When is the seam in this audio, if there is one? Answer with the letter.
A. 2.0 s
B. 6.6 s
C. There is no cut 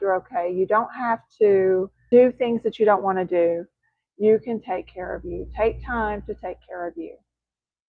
A